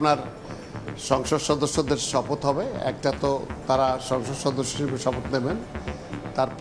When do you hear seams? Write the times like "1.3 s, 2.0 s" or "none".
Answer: none